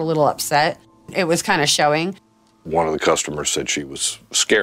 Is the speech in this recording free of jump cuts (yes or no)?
no